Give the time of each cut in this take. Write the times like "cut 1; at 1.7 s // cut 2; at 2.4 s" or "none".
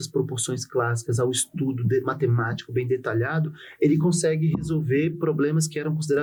none